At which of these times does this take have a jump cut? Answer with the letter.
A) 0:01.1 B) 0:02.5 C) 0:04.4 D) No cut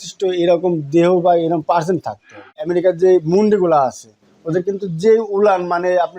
B